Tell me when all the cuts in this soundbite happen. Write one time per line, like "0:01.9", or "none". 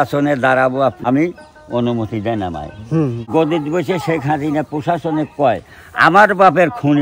0:01.0
0:03.2